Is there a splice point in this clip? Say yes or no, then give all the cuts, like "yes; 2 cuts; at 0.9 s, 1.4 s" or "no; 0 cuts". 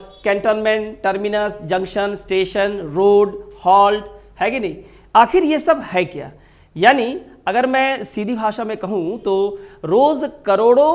no; 0 cuts